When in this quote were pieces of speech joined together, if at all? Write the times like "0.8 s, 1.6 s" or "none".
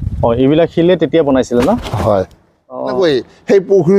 3.0 s